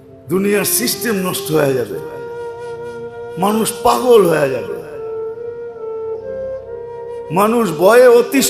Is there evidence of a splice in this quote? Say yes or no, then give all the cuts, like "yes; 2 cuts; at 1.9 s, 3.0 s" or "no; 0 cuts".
yes; 2 cuts; at 4.8 s, 6.6 s